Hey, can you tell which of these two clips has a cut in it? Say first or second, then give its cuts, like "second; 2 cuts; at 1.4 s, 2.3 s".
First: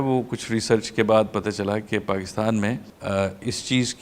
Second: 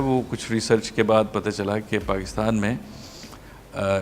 first; 1 cut; at 2.9 s